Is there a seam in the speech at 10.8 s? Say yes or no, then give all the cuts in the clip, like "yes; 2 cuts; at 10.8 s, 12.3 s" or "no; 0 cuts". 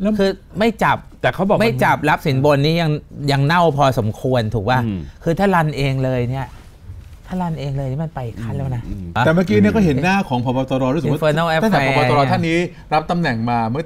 no; 1 cut; at 9.2 s